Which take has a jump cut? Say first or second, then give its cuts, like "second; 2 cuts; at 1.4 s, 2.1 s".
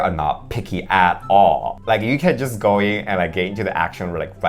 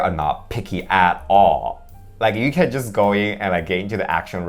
first; 1 cut; at 1.7 s